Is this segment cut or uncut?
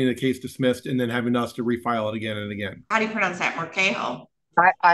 cut